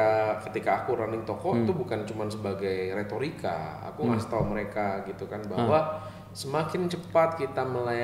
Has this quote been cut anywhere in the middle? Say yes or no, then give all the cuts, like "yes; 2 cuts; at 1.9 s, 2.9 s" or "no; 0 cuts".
no; 0 cuts